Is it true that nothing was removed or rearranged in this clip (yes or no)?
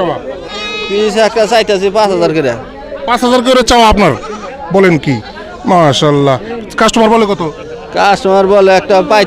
yes